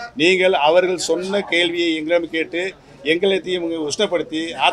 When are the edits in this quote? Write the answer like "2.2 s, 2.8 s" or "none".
none